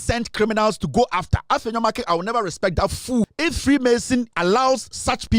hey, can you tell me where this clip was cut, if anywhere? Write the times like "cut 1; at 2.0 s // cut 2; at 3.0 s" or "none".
cut 1; at 3.3 s // cut 2; at 4.3 s